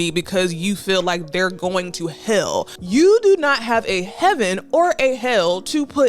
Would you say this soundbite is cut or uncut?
cut